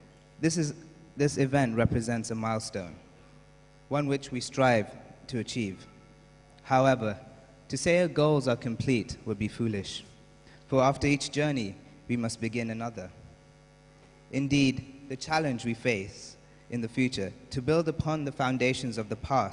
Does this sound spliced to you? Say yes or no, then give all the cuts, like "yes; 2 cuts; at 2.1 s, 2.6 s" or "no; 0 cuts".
no; 0 cuts